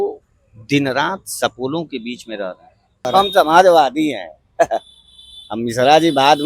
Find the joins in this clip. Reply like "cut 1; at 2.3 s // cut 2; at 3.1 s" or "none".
cut 1; at 3.1 s